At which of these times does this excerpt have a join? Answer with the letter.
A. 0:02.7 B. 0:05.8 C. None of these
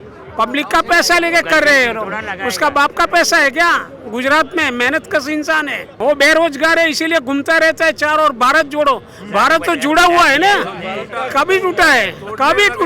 B